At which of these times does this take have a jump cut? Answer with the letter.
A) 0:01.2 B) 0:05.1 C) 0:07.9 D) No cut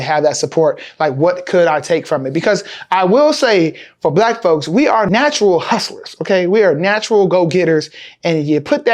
B